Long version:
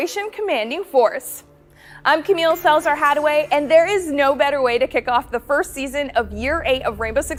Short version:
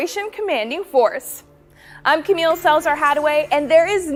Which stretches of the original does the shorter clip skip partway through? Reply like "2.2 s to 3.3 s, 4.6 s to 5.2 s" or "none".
none